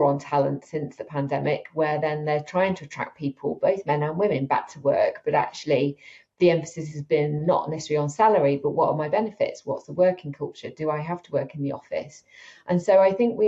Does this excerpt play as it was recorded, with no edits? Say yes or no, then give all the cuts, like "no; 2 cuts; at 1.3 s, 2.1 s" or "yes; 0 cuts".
yes; 0 cuts